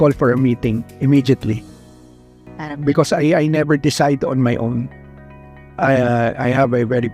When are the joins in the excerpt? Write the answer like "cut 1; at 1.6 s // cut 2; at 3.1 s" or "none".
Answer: none

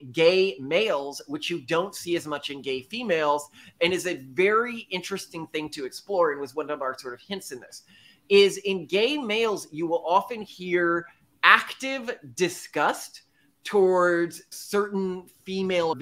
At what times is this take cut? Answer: none

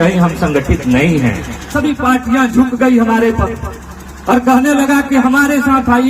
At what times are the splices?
cut 1; at 1.7 s

